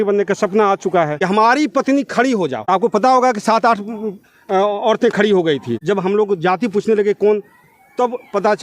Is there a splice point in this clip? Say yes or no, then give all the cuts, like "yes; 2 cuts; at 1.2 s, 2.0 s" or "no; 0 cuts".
yes; 3 cuts; at 1.1 s, 2.6 s, 5.7 s